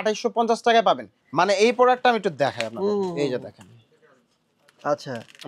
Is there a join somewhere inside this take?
yes; 1 cut; at 1.2 s

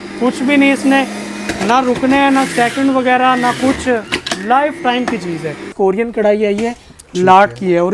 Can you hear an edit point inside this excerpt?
yes; 1 cut; at 5.7 s

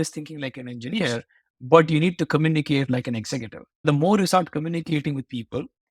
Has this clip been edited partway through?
yes; 1 cut; at 3.8 s

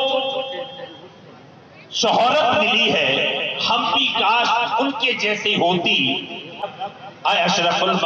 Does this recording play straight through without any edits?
no; 1 cut; at 6.7 s

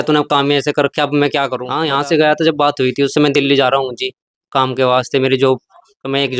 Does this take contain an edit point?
yes; 1 cut; at 1.6 s

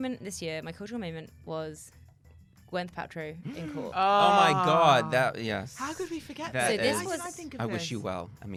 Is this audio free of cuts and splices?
yes; 0 cuts

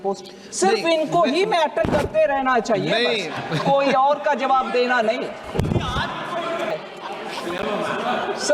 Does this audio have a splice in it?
yes; 1 cut; at 6.7 s

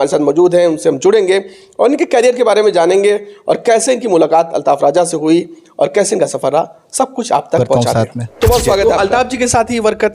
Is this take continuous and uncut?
no; 1 cut; at 8.8 s

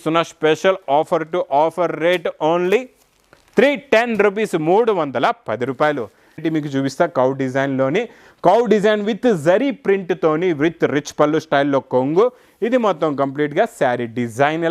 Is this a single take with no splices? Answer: no; 1 cut; at 6.4 s

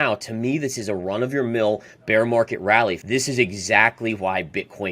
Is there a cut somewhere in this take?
yes; 1 cut; at 3.0 s

